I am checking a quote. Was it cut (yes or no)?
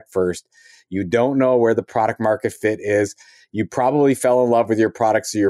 no